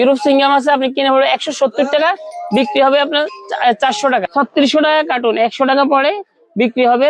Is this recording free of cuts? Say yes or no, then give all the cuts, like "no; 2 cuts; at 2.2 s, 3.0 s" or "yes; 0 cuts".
no; 1 cut; at 4.3 s